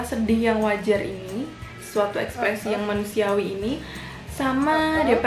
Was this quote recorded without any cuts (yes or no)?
yes